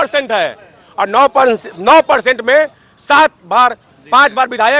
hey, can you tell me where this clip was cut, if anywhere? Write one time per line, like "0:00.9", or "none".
none